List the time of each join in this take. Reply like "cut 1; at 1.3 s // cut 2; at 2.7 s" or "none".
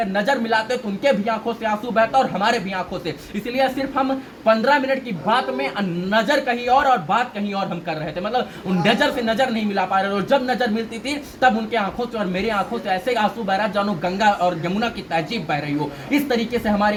none